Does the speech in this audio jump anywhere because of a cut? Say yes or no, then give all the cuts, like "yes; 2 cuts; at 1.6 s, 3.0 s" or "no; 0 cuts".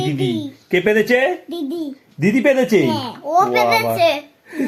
no; 0 cuts